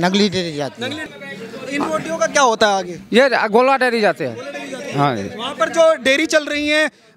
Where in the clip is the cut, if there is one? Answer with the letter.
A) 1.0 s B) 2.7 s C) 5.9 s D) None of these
A